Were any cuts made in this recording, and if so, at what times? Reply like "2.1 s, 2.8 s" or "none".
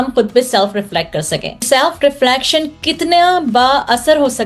1.6 s

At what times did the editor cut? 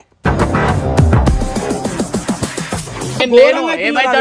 3.2 s

